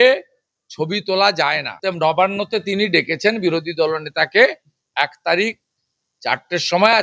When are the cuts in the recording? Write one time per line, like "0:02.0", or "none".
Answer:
0:01.7